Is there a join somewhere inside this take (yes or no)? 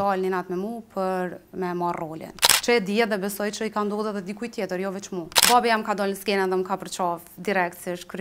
yes